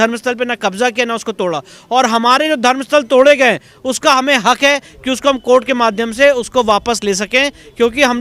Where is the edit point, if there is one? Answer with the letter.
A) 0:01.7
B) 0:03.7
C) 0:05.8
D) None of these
D